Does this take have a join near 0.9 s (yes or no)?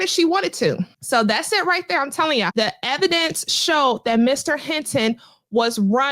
yes